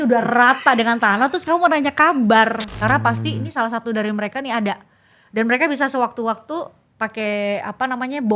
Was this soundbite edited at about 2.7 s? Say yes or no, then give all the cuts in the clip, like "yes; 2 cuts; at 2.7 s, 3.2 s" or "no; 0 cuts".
yes; 1 cut; at 2.7 s